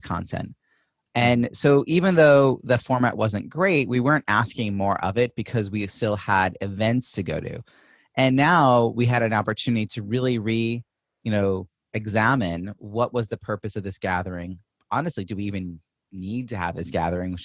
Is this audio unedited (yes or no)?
yes